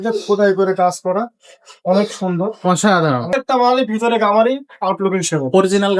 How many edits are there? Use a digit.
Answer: 1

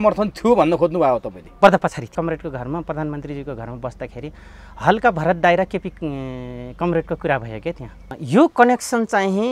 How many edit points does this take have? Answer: 2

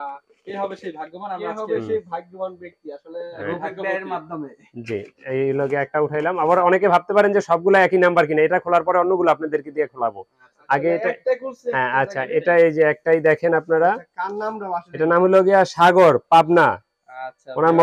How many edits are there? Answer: 0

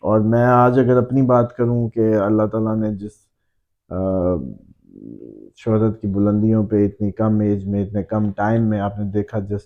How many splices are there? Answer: 0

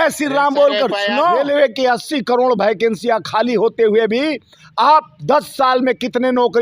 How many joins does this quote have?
1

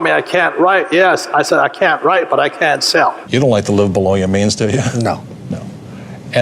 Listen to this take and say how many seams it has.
1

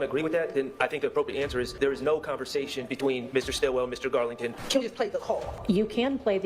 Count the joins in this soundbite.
3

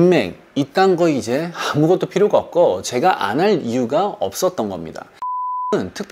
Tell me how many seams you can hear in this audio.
0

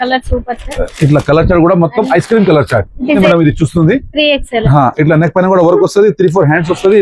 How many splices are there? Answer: 1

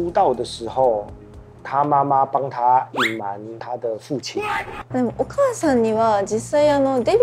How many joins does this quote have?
1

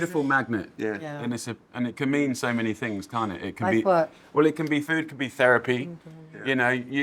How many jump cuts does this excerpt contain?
1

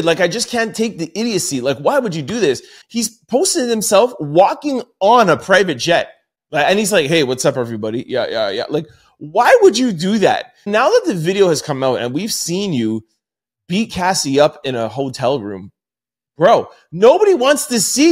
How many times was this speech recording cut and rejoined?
2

